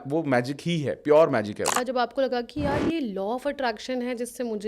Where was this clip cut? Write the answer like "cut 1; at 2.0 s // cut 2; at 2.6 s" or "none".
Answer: cut 1; at 1.7 s